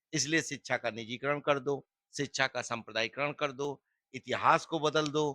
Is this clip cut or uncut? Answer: uncut